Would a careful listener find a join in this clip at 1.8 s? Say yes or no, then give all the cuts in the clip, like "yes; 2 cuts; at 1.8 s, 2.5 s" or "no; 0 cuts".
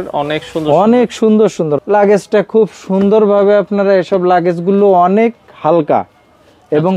yes; 1 cut; at 1.8 s